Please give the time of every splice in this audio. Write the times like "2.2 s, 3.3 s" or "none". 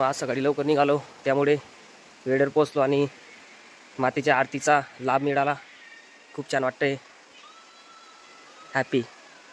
none